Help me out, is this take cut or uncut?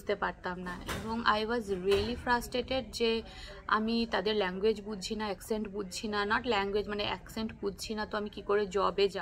uncut